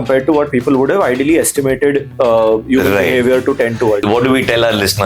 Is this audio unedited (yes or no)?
no